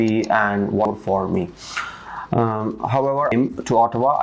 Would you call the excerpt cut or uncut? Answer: cut